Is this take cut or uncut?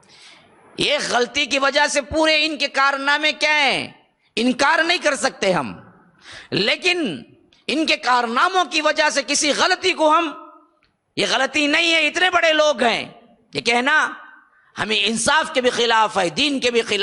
uncut